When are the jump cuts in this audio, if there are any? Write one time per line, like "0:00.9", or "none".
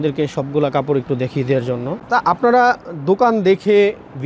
0:02.0